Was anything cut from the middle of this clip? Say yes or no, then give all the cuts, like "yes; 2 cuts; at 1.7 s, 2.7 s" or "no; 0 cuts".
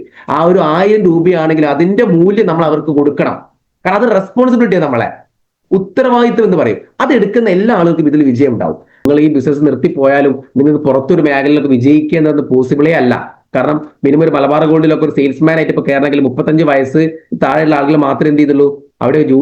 yes; 1 cut; at 9.0 s